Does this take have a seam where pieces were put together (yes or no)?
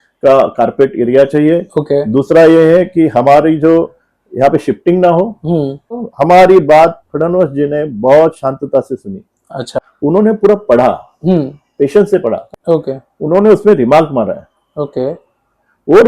yes